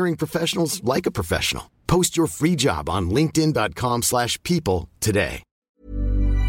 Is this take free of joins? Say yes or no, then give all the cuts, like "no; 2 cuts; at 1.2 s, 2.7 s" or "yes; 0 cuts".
no; 1 cut; at 5.6 s